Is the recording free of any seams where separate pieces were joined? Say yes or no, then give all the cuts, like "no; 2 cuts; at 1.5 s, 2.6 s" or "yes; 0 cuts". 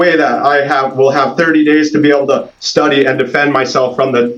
yes; 0 cuts